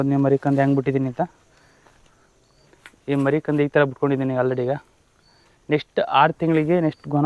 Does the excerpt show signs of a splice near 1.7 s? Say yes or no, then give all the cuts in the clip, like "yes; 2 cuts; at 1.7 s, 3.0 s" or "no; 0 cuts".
no; 0 cuts